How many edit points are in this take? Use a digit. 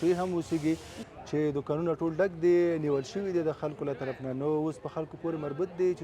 1